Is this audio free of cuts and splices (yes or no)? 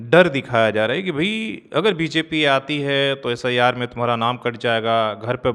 yes